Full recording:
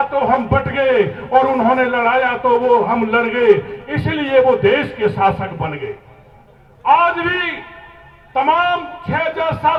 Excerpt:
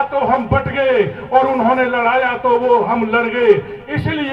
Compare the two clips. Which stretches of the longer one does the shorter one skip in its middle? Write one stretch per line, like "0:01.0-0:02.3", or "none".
none